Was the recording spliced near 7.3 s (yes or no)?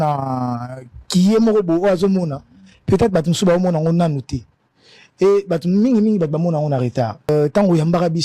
yes